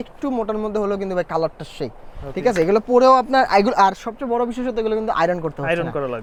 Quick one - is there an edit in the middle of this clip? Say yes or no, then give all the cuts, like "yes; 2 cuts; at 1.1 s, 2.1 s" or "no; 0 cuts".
no; 0 cuts